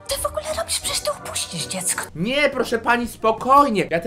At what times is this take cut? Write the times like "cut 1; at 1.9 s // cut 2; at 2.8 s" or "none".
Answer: none